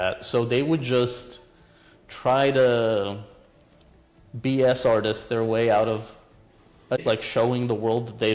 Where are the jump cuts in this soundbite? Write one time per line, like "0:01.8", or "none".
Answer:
0:07.2